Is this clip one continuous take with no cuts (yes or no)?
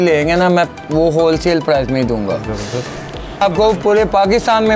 no